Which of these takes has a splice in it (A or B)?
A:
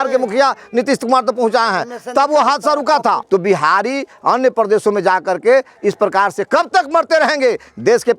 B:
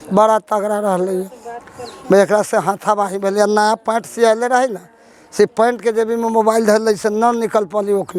A